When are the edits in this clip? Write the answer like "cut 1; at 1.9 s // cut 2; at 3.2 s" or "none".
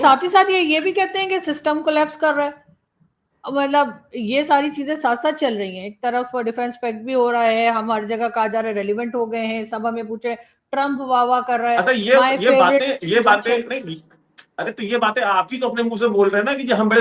none